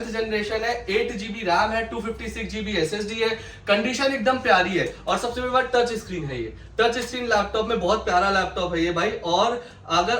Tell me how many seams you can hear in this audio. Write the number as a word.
zero